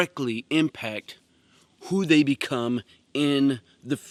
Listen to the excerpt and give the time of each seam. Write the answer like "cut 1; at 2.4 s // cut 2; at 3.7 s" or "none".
none